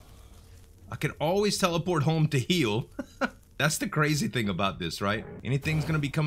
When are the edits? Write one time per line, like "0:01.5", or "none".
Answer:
0:03.4
0:05.3